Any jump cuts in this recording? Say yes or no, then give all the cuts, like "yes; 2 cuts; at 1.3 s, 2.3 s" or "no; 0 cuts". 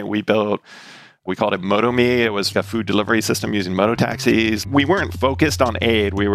yes; 2 cuts; at 2.5 s, 5.0 s